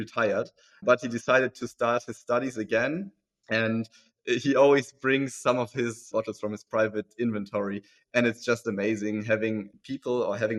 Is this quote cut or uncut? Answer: uncut